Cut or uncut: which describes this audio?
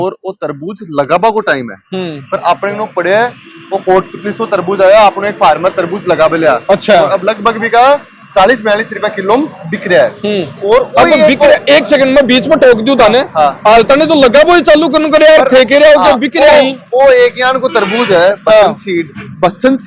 uncut